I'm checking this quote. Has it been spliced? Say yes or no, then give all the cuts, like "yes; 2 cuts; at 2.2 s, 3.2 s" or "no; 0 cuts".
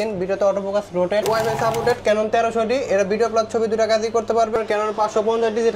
yes; 2 cuts; at 1.2 s, 4.5 s